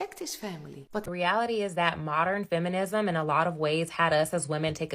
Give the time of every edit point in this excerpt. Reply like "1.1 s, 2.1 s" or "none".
1.0 s